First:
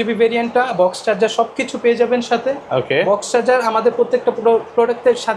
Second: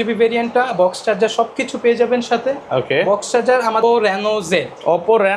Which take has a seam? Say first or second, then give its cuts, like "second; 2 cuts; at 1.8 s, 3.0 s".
second; 1 cut; at 3.8 s